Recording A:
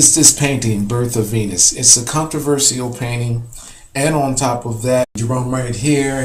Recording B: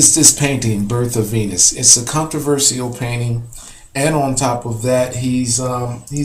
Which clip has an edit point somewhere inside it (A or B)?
B